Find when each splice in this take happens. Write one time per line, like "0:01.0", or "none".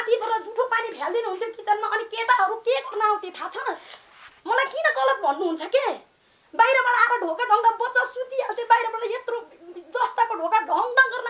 none